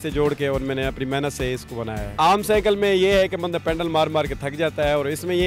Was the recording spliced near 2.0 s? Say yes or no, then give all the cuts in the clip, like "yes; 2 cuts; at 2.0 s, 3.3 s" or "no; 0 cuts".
yes; 1 cut; at 2.0 s